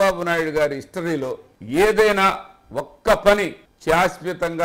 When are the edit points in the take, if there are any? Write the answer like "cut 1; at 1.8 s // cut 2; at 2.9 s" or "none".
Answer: cut 1; at 1.5 s // cut 2; at 3.6 s